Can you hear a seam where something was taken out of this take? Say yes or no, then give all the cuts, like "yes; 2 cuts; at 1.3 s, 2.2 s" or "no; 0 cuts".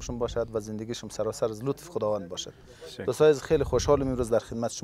no; 0 cuts